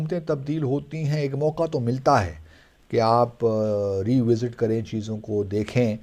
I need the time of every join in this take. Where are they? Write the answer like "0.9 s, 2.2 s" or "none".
none